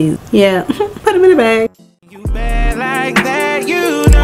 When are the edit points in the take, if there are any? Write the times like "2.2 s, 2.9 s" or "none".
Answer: 1.8 s